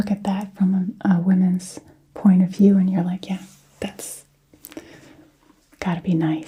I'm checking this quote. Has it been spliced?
no; 0 cuts

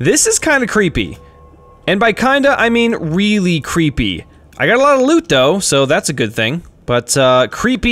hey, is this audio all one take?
no; 1 cut; at 6.7 s

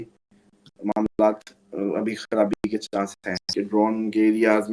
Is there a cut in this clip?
yes; 1 cut; at 3.4 s

